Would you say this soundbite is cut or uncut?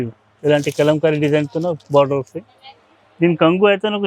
uncut